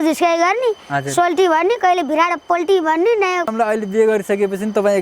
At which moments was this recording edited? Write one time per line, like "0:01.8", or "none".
0:03.5